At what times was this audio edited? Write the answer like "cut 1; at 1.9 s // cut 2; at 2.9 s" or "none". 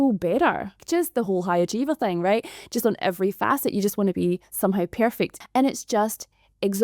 cut 1; at 0.8 s // cut 2; at 5.4 s